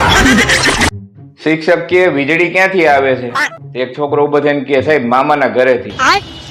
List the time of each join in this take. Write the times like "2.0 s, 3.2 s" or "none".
0.9 s